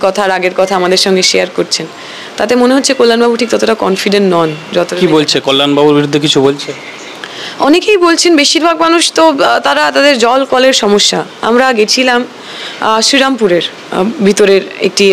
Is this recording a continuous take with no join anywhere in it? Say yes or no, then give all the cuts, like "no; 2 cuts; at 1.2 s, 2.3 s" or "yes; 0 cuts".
yes; 0 cuts